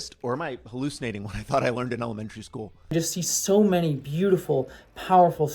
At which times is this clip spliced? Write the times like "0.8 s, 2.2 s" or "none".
2.9 s